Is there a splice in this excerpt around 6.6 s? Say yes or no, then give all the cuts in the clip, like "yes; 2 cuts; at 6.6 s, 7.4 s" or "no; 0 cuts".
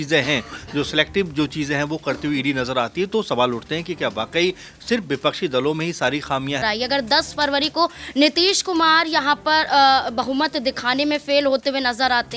yes; 1 cut; at 6.6 s